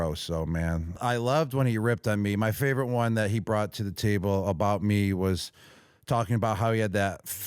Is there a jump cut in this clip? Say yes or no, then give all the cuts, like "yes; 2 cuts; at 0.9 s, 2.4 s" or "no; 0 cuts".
yes; 1 cut; at 1.0 s